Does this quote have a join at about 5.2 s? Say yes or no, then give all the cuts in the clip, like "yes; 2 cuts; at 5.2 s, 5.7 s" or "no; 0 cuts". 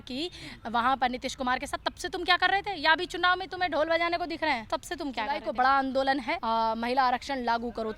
yes; 2 cuts; at 5.2 s, 6.3 s